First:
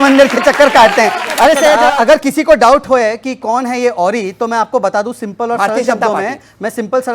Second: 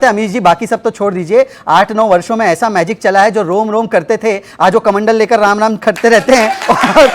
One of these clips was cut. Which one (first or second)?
first